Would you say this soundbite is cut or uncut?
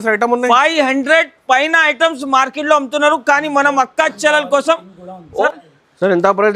cut